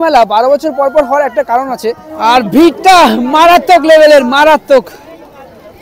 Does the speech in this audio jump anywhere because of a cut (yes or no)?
yes